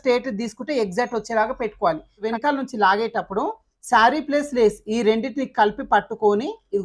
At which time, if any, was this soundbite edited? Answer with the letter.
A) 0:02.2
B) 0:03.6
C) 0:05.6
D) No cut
A